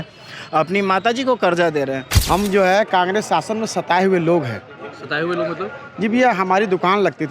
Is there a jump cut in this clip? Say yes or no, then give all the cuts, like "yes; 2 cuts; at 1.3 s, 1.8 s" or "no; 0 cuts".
yes; 1 cut; at 2.1 s